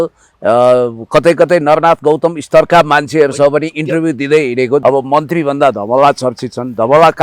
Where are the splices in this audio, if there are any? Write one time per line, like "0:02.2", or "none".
0:04.8